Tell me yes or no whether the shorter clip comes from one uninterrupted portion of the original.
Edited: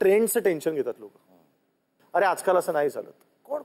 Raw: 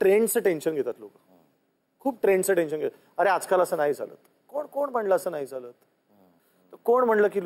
no